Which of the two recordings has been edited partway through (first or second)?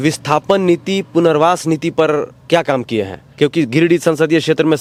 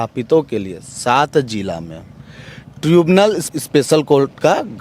second